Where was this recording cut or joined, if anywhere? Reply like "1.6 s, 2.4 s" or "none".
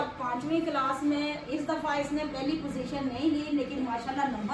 none